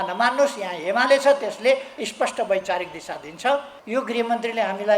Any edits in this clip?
yes; 1 cut; at 3.7 s

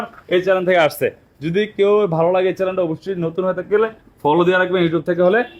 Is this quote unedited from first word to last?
yes; 0 cuts

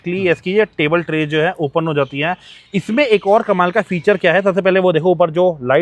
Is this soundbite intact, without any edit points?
yes; 0 cuts

